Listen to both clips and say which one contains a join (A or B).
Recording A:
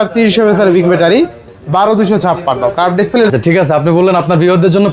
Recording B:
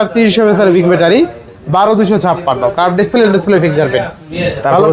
A